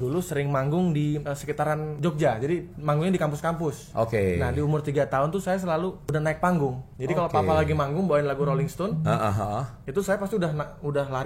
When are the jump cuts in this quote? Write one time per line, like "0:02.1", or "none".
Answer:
0:01.7
0:03.8
0:06.0
0:06.9